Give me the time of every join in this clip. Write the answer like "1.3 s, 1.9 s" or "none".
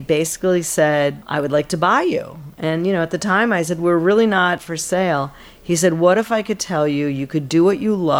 1.2 s, 4.6 s